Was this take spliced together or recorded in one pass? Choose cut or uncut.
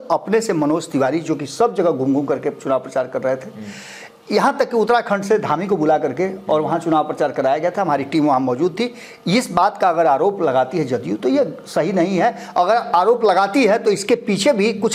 uncut